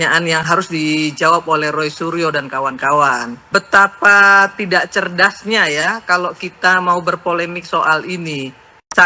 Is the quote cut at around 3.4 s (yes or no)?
yes